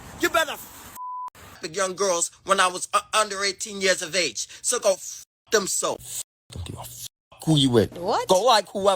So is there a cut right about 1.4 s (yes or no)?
yes